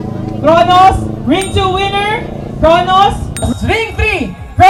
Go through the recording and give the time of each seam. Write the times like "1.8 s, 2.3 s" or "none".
none